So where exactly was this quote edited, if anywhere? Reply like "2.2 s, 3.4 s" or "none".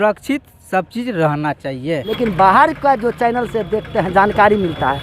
2.1 s